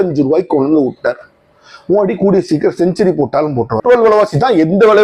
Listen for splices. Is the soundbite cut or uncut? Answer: cut